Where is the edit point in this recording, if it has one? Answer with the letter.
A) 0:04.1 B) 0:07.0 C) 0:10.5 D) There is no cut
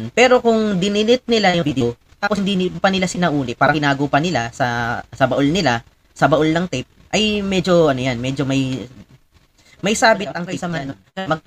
C